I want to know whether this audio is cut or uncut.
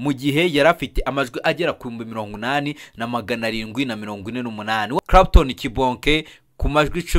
cut